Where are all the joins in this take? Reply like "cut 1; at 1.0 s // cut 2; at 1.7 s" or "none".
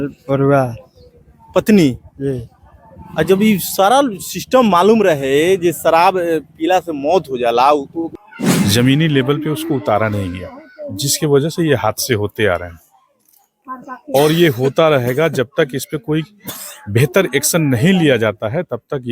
cut 1; at 8.1 s